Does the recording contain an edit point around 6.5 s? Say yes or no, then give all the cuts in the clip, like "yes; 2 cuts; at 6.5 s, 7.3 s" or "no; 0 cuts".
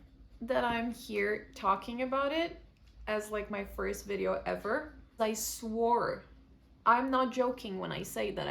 no; 1 cut; at 5.2 s